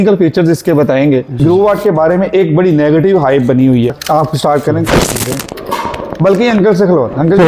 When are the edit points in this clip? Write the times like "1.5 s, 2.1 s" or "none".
1.4 s, 4.0 s